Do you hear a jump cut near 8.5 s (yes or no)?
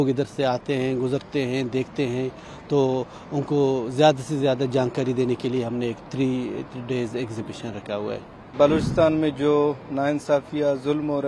yes